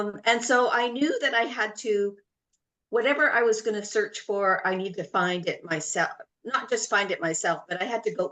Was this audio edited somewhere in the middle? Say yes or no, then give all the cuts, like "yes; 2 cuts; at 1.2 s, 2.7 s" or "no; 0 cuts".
no; 0 cuts